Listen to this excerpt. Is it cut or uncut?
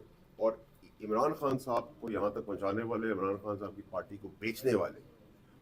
uncut